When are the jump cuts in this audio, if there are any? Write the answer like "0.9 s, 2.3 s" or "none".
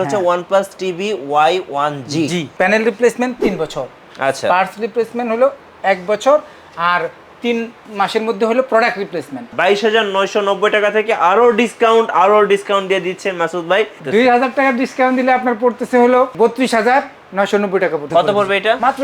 2.5 s, 9.5 s, 14.0 s, 18.1 s